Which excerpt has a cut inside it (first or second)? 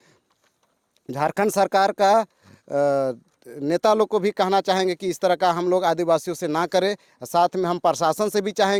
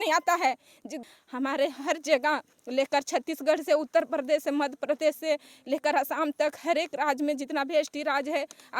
second